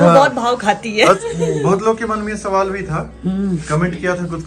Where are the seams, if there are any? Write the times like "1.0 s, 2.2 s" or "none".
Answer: 1.2 s